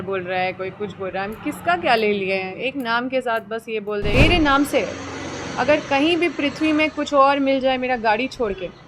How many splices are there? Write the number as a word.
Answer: one